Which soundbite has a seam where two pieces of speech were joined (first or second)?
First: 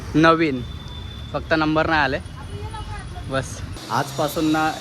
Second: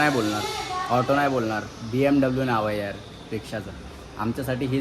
first